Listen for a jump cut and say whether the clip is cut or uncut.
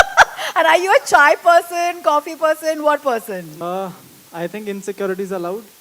cut